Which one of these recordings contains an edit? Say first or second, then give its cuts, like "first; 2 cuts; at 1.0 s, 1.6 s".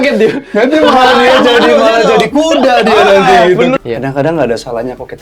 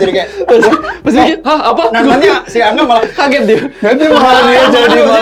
first; 1 cut; at 3.7 s